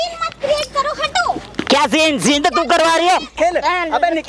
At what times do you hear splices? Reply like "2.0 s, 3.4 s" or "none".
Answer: 3.3 s